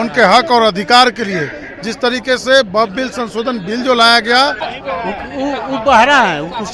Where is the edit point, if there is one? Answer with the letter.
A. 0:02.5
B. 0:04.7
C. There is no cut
B